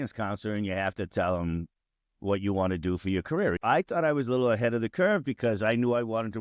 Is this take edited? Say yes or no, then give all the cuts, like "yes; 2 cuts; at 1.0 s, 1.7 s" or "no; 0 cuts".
yes; 1 cut; at 3.6 s